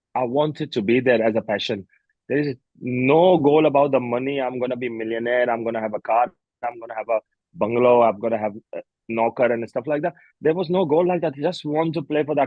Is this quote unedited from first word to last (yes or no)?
yes